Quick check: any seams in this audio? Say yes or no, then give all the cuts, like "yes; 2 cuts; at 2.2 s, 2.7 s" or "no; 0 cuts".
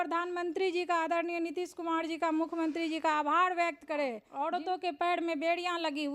yes; 1 cut; at 4.3 s